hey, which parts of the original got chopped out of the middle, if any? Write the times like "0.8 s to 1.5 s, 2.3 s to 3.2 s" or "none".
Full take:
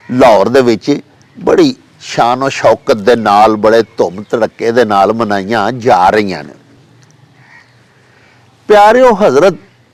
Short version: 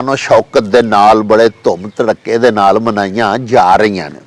none